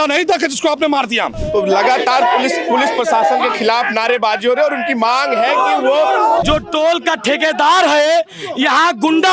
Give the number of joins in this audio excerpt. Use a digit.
2